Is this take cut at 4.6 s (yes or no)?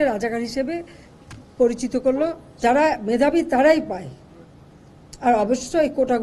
no